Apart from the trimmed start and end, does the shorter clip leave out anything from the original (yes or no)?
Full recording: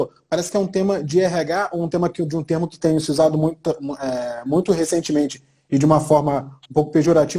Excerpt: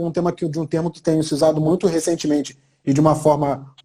yes